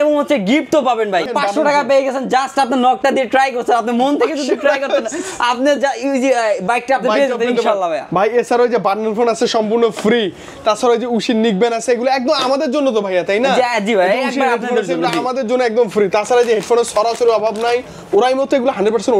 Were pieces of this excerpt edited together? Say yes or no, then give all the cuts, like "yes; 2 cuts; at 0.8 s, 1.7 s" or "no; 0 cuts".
yes; 1 cut; at 1.3 s